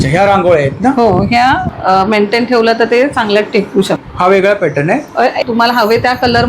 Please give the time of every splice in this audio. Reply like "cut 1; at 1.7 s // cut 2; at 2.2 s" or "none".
cut 1; at 1.7 s // cut 2; at 5.4 s